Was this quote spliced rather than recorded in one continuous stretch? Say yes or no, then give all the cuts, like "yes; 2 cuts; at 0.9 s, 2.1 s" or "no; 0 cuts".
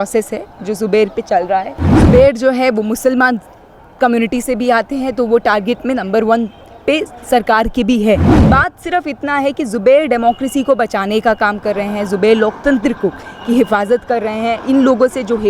yes; 2 cuts; at 1.8 s, 8.4 s